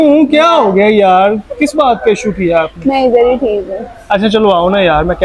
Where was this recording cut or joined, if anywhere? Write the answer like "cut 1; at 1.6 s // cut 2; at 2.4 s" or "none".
none